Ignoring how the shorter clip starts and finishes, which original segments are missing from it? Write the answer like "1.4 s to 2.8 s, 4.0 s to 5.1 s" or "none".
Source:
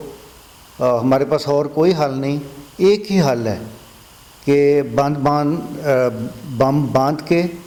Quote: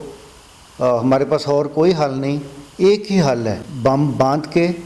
3.6 s to 6.4 s